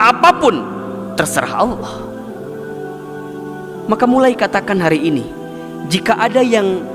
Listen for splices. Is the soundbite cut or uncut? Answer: cut